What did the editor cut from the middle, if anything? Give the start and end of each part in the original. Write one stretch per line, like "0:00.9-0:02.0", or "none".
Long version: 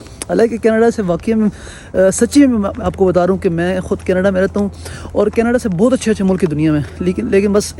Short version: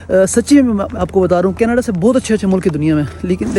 0:03.4-0:05.3